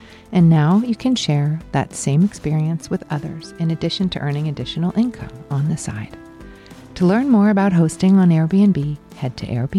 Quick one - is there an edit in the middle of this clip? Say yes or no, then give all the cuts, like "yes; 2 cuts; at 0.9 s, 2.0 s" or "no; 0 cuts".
no; 0 cuts